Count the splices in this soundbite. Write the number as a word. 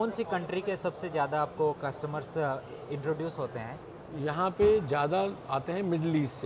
zero